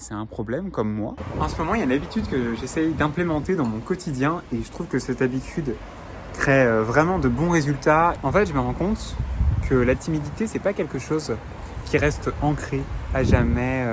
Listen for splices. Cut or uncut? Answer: cut